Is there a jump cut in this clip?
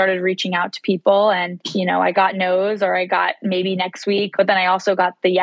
yes; 2 cuts; at 2.1 s, 4.3 s

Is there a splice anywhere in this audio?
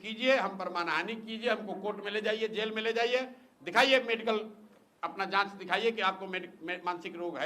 no; 0 cuts

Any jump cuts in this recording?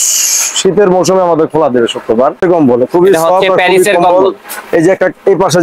yes; 1 cut; at 2.4 s

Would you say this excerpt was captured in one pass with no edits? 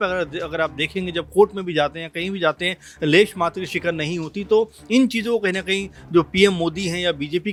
yes; 0 cuts

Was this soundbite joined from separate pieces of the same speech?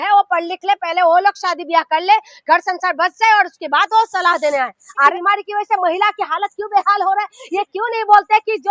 yes; 1 cut; at 5.1 s

